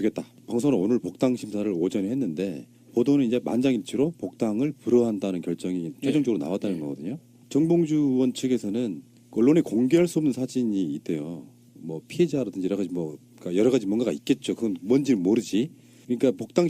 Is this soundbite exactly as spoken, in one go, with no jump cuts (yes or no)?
yes